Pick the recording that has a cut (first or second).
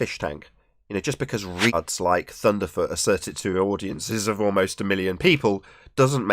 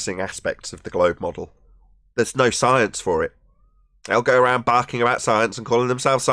first